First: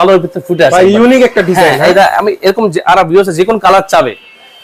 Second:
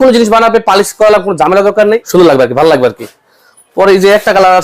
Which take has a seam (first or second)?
second